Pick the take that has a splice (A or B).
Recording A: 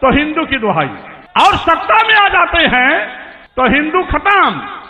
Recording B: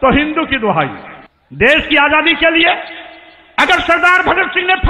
B